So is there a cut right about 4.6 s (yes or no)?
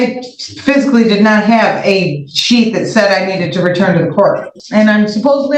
yes